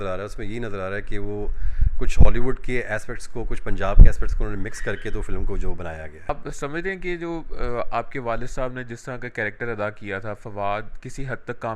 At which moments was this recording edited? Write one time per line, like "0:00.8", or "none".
0:06.3